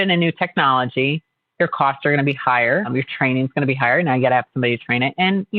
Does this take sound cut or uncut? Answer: cut